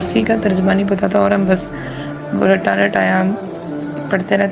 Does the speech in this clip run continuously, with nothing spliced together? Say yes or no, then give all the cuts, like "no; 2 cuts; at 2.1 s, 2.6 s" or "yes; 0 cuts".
yes; 0 cuts